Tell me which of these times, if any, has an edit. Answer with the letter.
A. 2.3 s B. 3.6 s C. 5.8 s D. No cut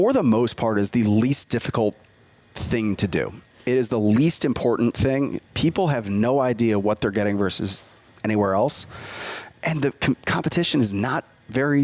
D